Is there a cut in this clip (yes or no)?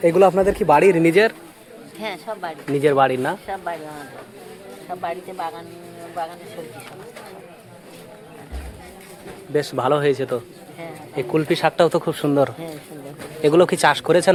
no